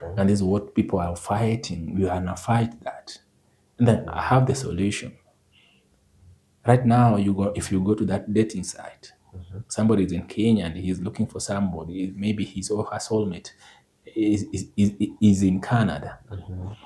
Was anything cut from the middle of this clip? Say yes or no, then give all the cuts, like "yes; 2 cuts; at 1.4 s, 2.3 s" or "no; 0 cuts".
no; 0 cuts